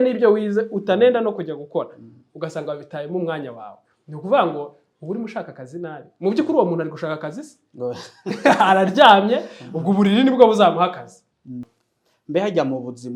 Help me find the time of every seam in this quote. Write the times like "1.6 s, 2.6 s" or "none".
11.6 s